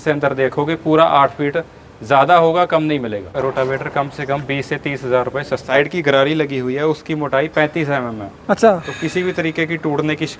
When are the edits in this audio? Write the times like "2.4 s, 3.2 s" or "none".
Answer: 3.3 s, 5.6 s